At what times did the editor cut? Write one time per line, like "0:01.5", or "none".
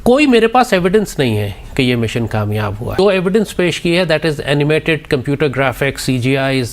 0:02.9